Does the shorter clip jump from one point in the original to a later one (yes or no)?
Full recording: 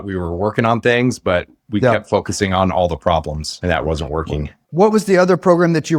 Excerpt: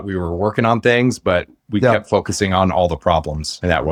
no